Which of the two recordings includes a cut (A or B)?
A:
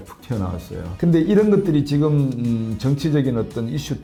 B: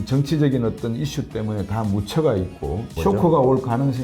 B